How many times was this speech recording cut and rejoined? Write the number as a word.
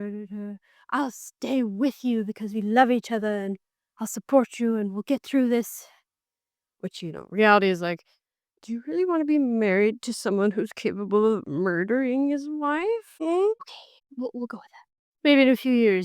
two